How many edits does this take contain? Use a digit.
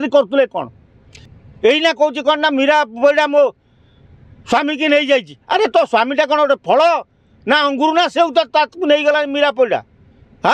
0